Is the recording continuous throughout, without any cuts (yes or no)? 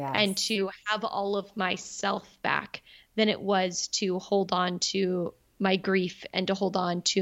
yes